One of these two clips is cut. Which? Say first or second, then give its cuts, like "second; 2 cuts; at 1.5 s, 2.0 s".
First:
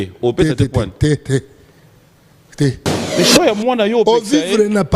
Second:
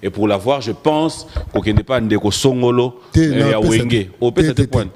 first; 1 cut; at 2.9 s